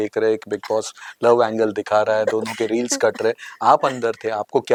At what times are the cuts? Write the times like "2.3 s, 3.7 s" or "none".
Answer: none